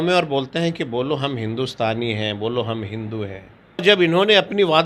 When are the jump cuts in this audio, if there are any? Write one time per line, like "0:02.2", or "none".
0:03.8